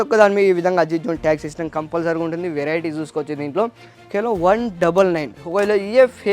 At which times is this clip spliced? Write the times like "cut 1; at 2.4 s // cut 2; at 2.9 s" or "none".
cut 1; at 3.9 s

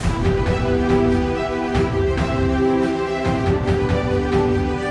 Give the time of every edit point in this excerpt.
none

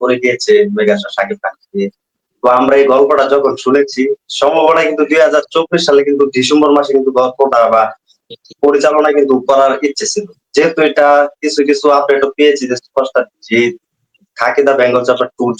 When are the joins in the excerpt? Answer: none

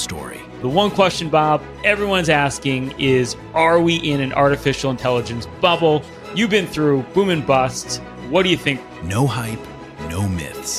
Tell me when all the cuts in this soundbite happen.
none

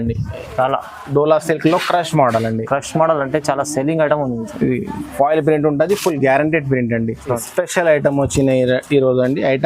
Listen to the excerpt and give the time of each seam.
cut 1; at 7.4 s

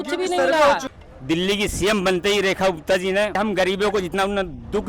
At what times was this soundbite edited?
cut 1; at 0.9 s // cut 2; at 3.3 s

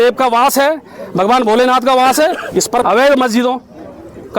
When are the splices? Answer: cut 1; at 2.8 s

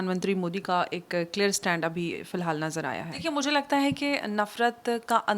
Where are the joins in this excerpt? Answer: cut 1; at 3.1 s

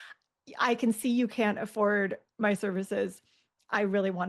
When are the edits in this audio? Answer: none

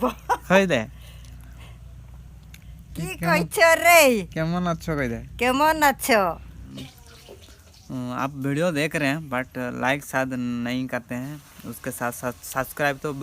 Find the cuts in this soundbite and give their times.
cut 1; at 6.6 s

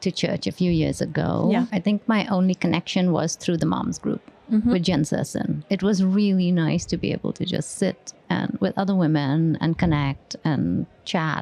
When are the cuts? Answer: cut 1; at 1.7 s // cut 2; at 5.6 s

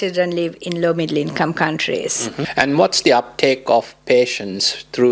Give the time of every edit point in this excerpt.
cut 1; at 2.5 s

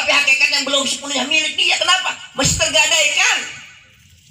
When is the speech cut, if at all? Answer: none

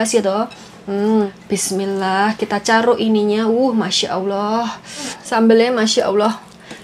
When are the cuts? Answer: cut 1; at 1.4 s // cut 2; at 5.2 s

